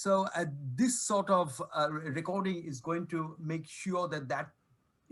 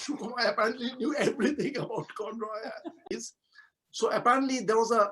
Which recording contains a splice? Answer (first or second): second